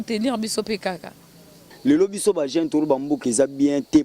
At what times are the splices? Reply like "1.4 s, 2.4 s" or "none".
1.6 s

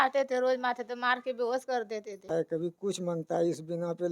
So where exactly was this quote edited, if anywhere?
2.2 s

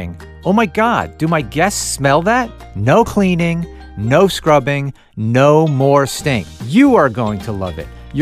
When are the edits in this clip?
2.6 s, 6.5 s

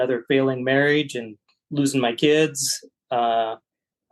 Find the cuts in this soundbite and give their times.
none

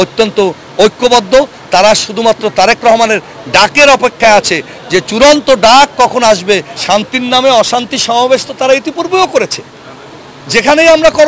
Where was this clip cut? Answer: 6.7 s

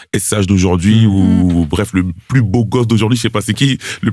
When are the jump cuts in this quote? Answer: none

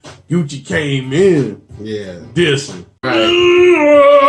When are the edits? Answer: 3.1 s

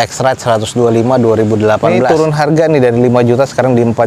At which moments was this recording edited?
2.0 s

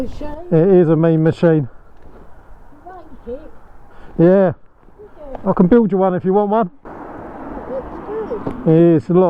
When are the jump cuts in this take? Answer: none

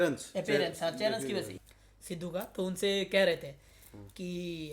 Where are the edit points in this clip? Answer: 1.6 s

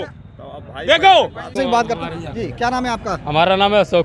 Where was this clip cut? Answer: 1.5 s

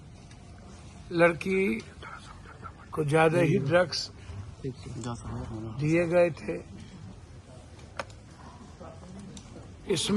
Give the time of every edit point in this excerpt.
none

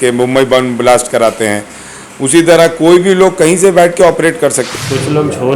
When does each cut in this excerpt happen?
4.6 s

